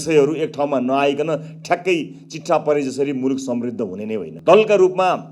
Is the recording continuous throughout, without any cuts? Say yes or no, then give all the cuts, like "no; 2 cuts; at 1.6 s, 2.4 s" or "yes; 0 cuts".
no; 1 cut; at 4.3 s